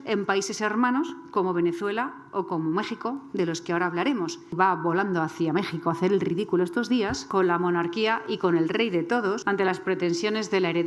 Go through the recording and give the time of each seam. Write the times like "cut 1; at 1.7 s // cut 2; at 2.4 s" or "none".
cut 1; at 4.5 s // cut 2; at 7.2 s // cut 3; at 9.4 s